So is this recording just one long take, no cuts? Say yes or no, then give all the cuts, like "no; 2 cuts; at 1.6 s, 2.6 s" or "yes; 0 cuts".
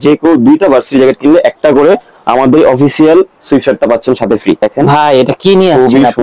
no; 1 cut; at 4.6 s